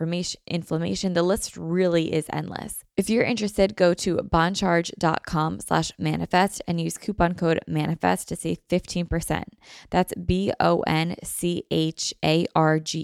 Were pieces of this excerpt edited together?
yes; 1 cut; at 2.8 s

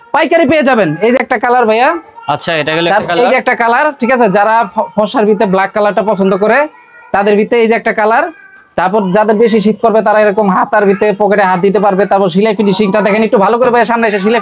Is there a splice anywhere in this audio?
no; 0 cuts

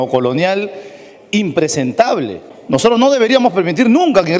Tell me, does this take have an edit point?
yes; 1 cut; at 2.5 s

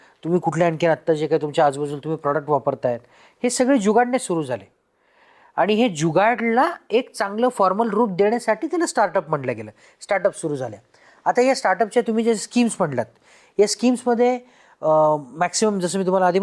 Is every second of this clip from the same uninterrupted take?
yes; 0 cuts

